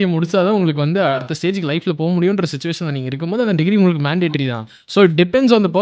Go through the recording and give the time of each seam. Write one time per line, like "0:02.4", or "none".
0:01.2